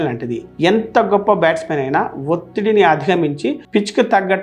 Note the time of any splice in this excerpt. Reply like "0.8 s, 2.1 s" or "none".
none

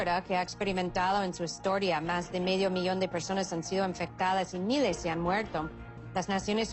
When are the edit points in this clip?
2.5 s

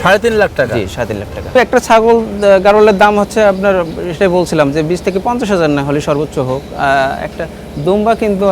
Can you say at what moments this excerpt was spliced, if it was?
1.5 s

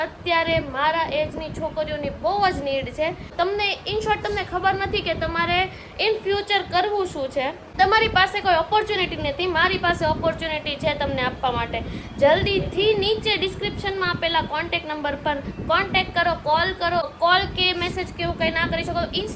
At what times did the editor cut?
3.3 s, 7.6 s, 17.1 s

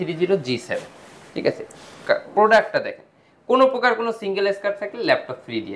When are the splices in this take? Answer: none

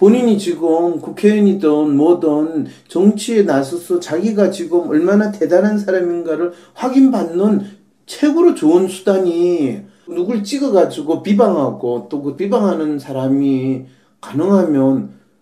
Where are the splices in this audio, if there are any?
12.6 s

